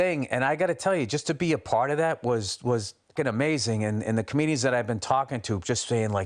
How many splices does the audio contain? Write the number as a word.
one